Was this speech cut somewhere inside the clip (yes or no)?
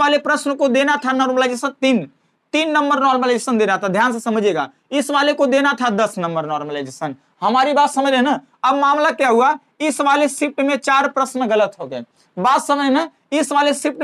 no